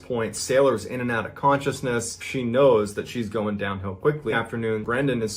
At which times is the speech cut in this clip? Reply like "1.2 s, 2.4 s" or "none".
4.3 s